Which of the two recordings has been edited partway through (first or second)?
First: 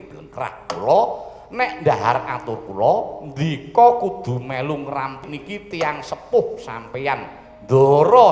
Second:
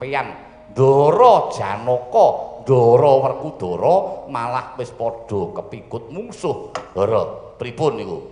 first